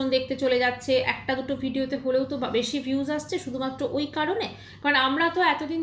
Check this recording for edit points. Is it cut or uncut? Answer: uncut